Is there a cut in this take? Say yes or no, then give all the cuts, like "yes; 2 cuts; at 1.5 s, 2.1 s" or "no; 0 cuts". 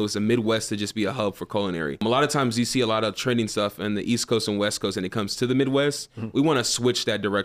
yes; 1 cut; at 2.0 s